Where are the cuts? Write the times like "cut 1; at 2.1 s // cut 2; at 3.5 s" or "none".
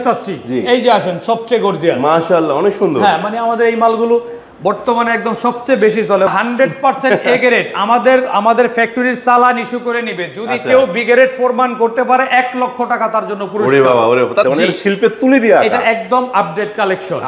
cut 1; at 5.9 s // cut 2; at 14.4 s